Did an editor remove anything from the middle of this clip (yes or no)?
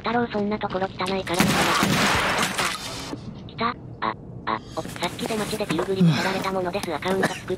yes